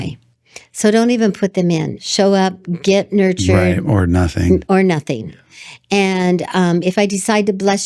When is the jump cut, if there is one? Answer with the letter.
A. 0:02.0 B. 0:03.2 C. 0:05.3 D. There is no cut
A